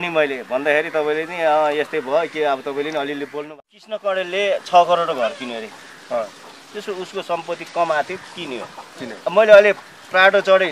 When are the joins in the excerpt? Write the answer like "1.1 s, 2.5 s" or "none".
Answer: 3.5 s